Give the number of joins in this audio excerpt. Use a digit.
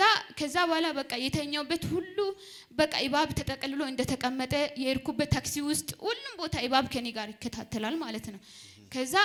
0